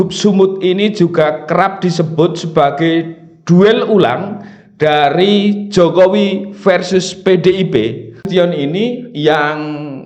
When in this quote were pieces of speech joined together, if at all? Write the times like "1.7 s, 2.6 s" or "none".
8.3 s